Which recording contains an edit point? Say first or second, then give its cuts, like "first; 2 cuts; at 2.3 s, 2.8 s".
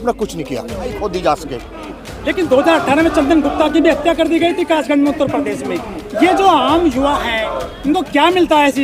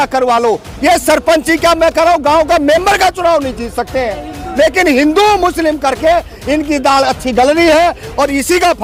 first; 1 cut; at 1.0 s